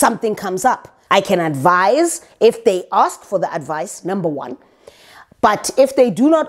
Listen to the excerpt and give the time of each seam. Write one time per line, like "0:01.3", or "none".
0:00.9